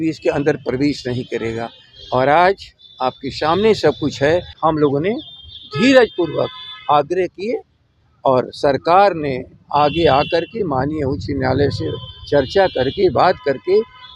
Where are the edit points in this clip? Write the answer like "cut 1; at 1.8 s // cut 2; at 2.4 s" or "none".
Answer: cut 1; at 4.5 s